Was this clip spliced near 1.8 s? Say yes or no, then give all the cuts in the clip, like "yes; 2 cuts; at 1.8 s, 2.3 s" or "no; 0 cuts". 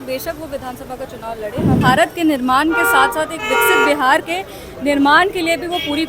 yes; 1 cut; at 1.8 s